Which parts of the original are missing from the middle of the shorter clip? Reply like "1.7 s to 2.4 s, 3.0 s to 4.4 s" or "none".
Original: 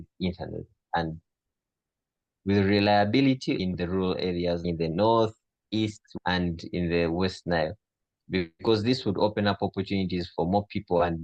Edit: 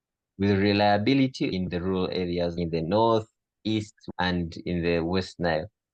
none

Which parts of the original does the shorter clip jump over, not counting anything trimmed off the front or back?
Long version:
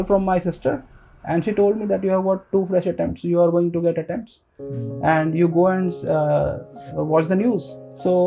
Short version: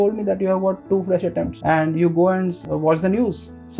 3.2 s to 4.9 s, 6.0 s to 6.8 s

